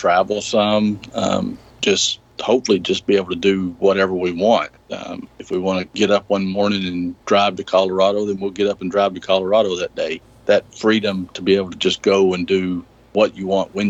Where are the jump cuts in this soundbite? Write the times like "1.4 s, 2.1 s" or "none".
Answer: none